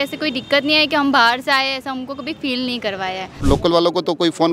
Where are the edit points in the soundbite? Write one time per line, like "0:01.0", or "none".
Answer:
0:03.4